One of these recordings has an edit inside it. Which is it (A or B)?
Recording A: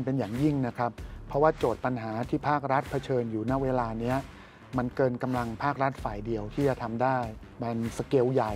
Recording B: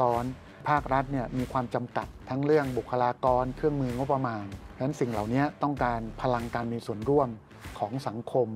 A